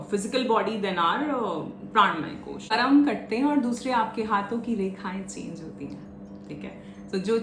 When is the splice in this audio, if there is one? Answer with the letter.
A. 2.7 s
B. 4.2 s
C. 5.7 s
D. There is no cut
A